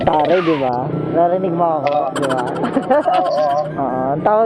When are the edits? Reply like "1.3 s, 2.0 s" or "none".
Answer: none